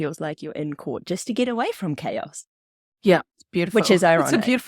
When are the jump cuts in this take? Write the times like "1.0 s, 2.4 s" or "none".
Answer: none